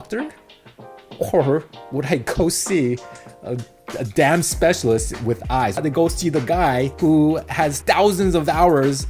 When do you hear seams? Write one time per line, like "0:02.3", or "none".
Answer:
0:05.8
0:06.9
0:07.8